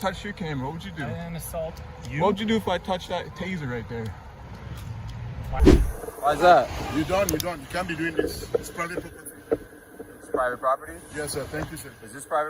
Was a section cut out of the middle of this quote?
yes; 1 cut; at 5.6 s

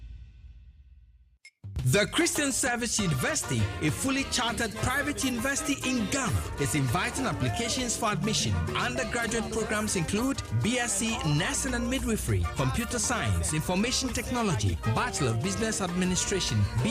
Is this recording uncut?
no; 1 cut; at 8.6 s

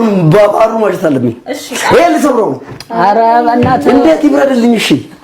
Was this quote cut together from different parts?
no; 0 cuts

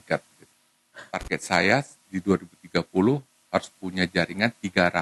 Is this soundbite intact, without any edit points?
no; 1 cut; at 1.2 s

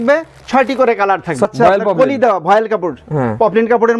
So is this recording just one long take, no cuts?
no; 1 cut; at 1.5 s

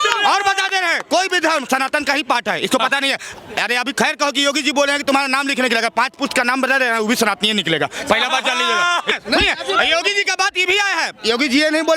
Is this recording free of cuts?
no; 1 cut; at 9.1 s

